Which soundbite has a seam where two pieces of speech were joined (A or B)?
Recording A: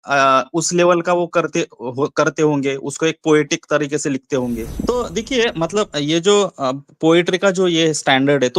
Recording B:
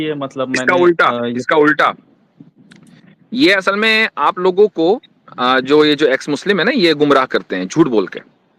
A